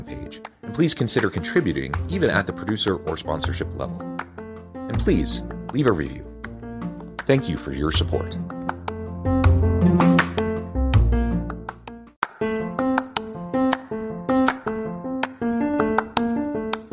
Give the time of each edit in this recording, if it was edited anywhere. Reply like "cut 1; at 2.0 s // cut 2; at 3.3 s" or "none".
cut 1; at 12.0 s

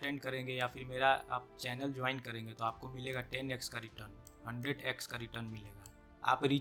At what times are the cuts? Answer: none

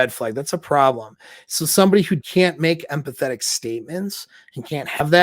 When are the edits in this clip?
cut 1; at 2.2 s

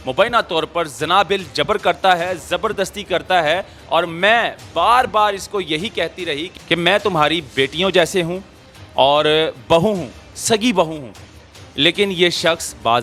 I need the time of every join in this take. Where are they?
none

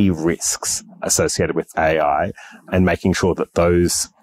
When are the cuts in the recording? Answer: none

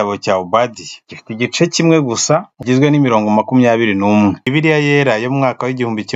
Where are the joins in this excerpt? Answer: cut 1; at 2.6 s // cut 2; at 4.4 s

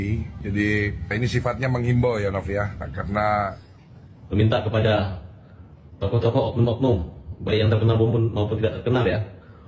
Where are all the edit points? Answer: cut 1; at 3.7 s

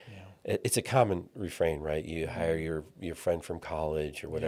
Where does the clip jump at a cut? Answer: none

